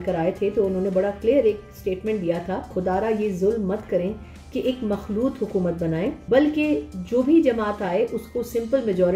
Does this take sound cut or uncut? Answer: cut